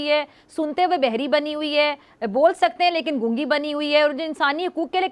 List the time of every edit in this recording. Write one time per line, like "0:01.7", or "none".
none